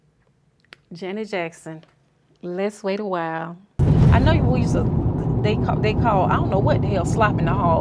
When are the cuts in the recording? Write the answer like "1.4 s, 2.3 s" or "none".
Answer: 3.8 s